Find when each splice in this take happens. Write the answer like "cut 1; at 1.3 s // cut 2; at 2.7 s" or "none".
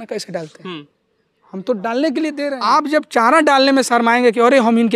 cut 1; at 2.4 s